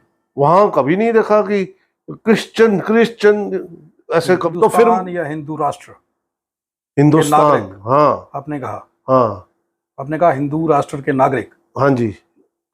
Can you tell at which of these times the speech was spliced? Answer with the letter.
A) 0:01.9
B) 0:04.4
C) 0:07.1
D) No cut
B